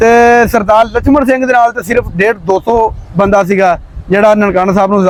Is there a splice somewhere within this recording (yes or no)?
no